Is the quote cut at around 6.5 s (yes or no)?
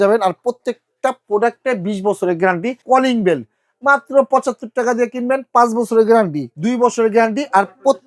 yes